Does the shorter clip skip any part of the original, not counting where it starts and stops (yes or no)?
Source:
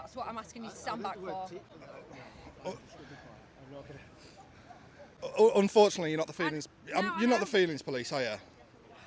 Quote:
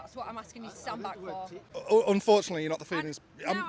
yes